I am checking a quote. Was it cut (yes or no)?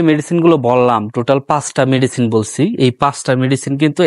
no